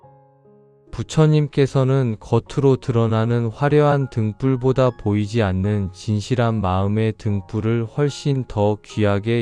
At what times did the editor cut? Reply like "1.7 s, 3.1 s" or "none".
0.9 s